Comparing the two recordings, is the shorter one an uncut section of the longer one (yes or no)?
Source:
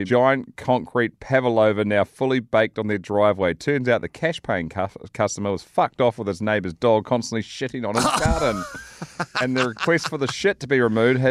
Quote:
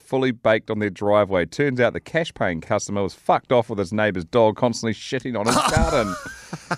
no